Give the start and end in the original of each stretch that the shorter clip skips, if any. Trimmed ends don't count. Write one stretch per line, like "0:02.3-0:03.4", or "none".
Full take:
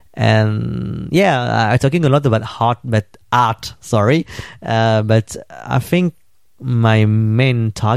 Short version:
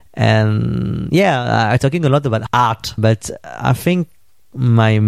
0:02.9-0:05.0